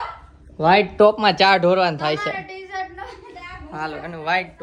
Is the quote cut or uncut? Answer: uncut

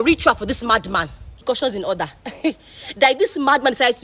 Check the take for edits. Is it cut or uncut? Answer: cut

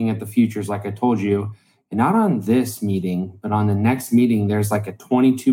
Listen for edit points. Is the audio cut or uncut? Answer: uncut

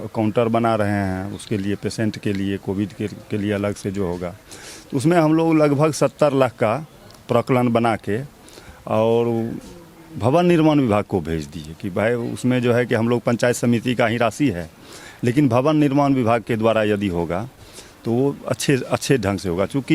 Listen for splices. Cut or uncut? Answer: uncut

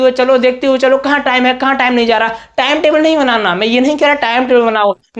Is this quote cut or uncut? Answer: uncut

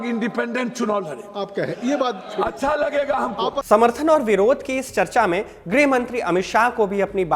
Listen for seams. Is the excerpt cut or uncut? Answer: uncut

